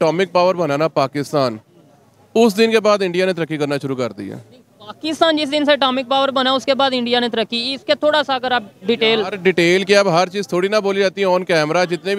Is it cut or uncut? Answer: uncut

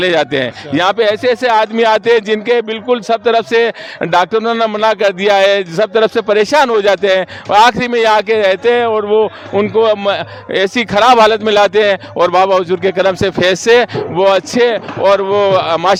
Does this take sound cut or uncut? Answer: uncut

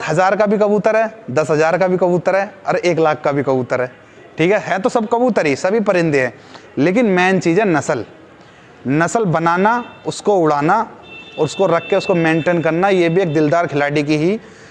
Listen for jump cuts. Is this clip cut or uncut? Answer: uncut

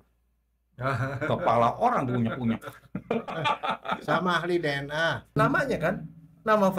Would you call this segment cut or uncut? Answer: cut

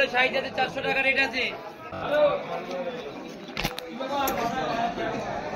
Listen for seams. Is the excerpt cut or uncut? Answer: cut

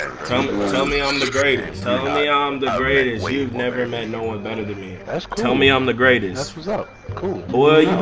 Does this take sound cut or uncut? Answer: uncut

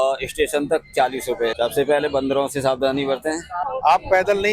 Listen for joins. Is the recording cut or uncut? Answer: cut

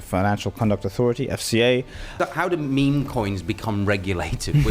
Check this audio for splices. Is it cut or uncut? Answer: cut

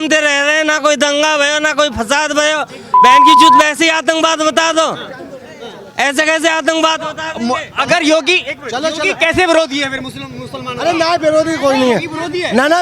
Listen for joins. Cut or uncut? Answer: uncut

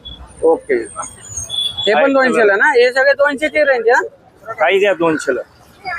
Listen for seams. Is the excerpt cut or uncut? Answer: uncut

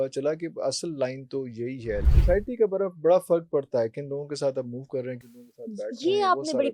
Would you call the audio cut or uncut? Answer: cut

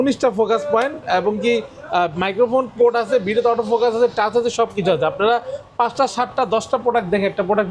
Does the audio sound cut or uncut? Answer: uncut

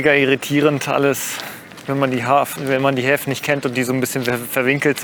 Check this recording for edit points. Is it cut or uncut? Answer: uncut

